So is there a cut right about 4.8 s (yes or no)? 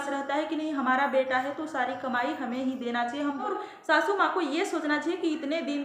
no